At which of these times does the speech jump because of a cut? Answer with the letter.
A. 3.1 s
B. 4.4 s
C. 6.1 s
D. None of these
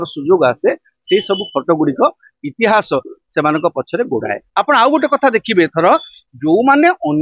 B